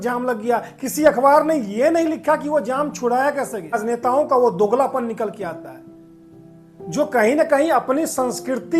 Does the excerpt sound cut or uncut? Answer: cut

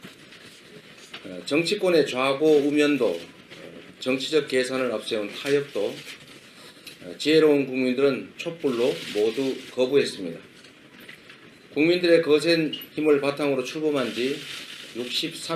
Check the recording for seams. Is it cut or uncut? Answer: cut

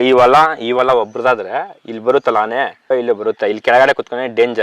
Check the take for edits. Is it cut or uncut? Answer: uncut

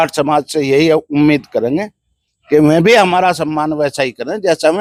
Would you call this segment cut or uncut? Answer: uncut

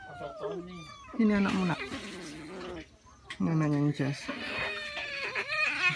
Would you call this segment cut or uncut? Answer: uncut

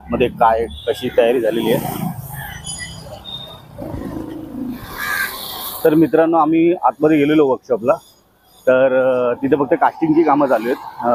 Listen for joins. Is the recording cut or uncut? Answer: uncut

